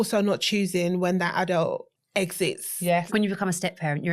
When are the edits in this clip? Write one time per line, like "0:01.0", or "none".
0:01.9
0:03.1